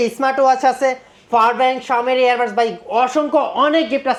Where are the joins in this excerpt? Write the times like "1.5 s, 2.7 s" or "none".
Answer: none